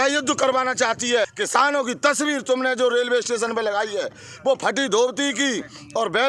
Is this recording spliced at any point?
yes; 1 cut; at 1.4 s

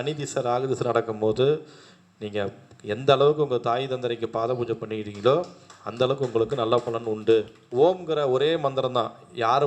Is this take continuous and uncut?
no; 1 cut; at 7.6 s

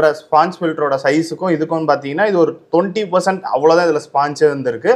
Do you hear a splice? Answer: no; 0 cuts

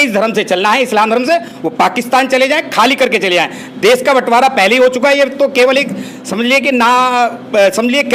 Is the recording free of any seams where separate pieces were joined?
yes; 0 cuts

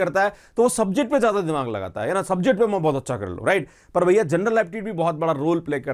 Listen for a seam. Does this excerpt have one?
no; 0 cuts

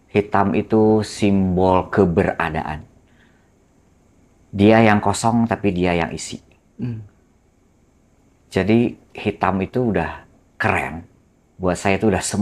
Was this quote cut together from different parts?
no; 0 cuts

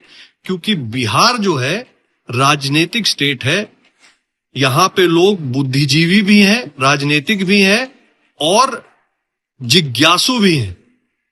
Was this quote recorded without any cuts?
yes; 0 cuts

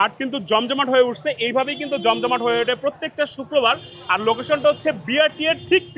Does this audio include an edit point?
no; 0 cuts

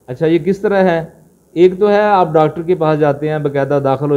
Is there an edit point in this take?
no; 0 cuts

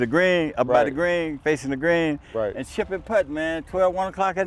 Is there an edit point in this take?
no; 0 cuts

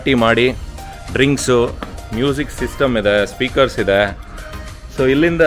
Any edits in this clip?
no; 0 cuts

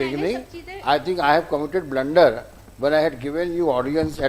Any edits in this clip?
no; 0 cuts

